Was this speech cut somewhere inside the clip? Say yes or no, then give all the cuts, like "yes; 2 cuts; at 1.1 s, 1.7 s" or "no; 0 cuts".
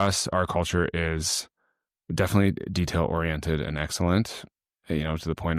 no; 0 cuts